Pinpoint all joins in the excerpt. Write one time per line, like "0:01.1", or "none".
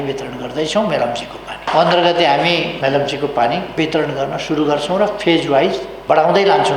0:01.7
0:02.7
0:03.7
0:05.9